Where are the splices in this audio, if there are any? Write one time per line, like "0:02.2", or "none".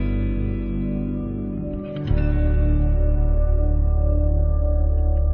0:01.9